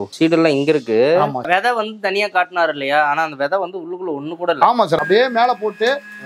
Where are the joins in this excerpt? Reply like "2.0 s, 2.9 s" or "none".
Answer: 1.5 s, 5.0 s